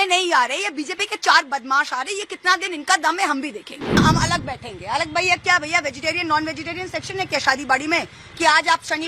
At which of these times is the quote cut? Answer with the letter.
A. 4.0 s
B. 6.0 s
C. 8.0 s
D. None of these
A